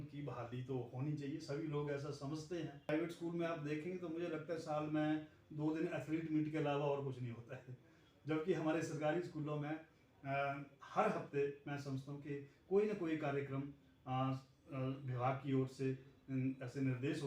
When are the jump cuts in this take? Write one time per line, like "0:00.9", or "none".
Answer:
0:02.9